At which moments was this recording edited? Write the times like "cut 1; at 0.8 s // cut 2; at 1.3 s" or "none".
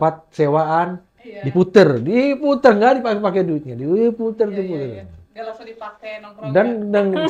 none